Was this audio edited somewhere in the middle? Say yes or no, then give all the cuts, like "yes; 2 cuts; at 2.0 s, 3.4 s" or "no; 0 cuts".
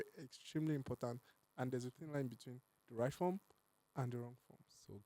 yes; 1 cut; at 1.3 s